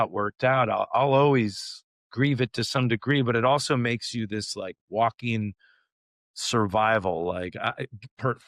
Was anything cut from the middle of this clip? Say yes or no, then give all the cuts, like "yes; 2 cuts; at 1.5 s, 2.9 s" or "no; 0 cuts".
no; 0 cuts